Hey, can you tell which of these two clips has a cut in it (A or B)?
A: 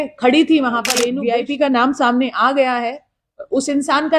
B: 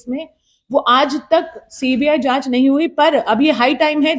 A